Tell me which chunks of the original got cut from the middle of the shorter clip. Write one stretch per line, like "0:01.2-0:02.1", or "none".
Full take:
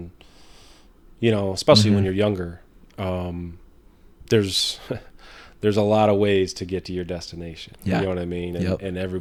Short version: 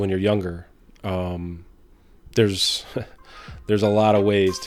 none